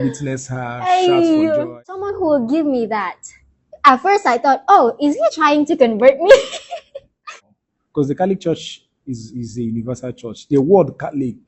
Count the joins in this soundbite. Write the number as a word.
two